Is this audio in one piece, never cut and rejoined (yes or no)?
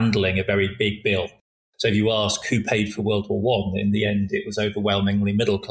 yes